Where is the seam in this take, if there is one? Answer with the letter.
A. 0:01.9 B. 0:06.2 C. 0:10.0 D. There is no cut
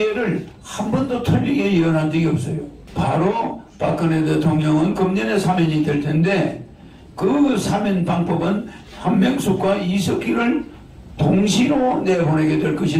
D